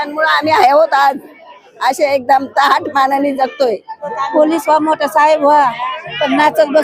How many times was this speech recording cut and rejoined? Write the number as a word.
one